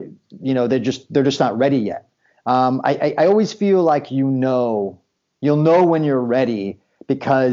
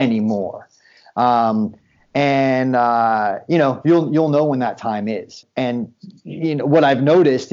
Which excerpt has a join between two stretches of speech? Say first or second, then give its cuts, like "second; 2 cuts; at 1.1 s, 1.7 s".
second; 1 cut; at 5.4 s